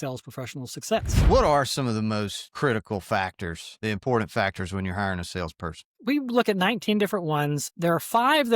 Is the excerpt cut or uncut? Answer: cut